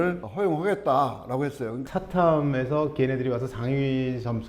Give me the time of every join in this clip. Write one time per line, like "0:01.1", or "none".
0:01.9